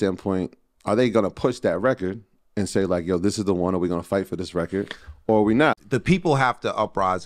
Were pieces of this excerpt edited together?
yes; 1 cut; at 5.8 s

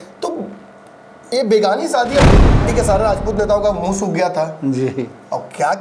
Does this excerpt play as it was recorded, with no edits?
no; 1 cut; at 2.5 s

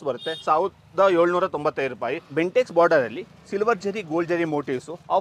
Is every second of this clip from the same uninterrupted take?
no; 1 cut; at 2.2 s

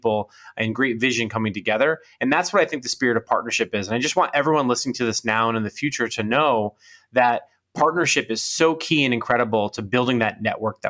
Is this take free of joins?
yes; 0 cuts

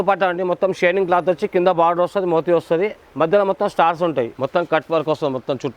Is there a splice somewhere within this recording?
yes; 1 cut; at 4.3 s

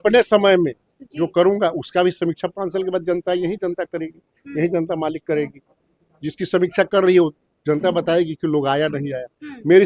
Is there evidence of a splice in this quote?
no; 0 cuts

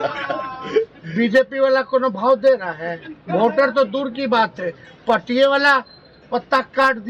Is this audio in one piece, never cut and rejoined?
yes; 0 cuts

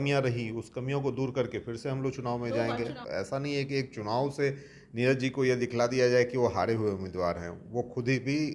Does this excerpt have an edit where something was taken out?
yes; 1 cut; at 3.0 s

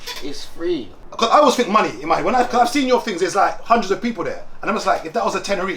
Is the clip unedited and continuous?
no; 1 cut; at 1.0 s

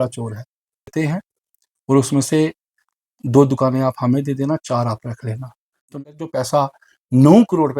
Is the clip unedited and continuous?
no; 2 cuts; at 0.9 s, 5.9 s

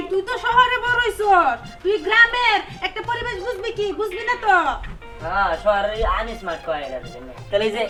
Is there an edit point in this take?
no; 0 cuts

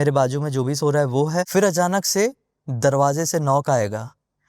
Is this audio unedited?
no; 1 cut; at 1.5 s

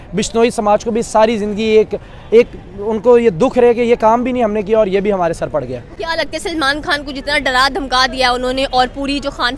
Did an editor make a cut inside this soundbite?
no; 0 cuts

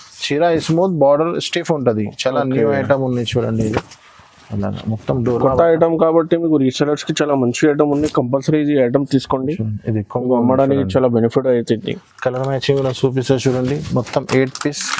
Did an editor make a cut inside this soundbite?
no; 0 cuts

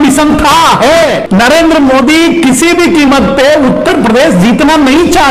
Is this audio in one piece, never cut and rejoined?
no; 1 cut; at 1.2 s

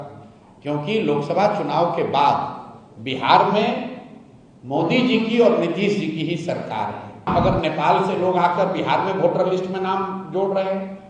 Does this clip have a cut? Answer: yes; 1 cut; at 7.3 s

